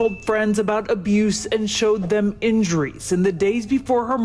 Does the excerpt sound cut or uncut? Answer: uncut